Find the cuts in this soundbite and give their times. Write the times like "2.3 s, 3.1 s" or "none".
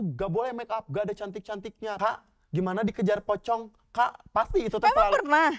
1.9 s